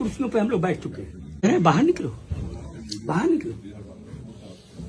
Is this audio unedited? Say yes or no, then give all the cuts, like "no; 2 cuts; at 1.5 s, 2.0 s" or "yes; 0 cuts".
no; 1 cut; at 1.4 s